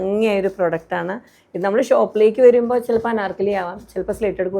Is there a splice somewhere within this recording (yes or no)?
no